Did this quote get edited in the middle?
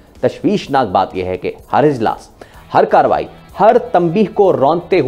no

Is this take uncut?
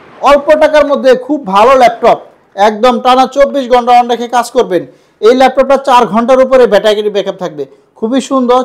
yes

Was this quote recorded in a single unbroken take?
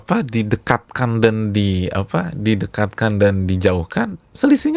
yes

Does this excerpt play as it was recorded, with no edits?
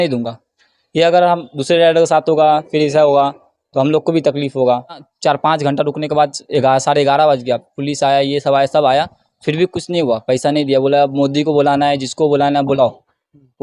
no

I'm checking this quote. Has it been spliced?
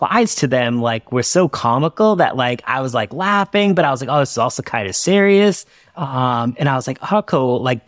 no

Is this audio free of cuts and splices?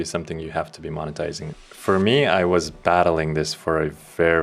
no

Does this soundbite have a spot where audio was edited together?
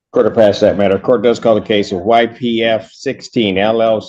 no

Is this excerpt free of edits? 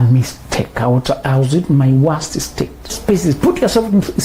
no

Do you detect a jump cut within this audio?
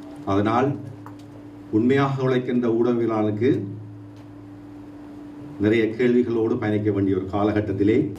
no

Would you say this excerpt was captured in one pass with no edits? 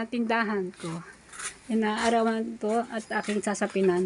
yes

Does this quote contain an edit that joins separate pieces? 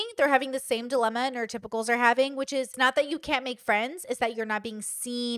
yes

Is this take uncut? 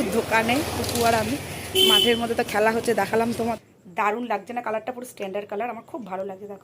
no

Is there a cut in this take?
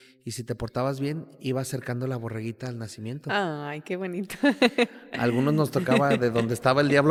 no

